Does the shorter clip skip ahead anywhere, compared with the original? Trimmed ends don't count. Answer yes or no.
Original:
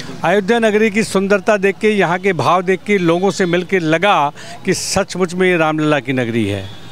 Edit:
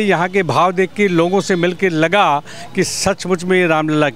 no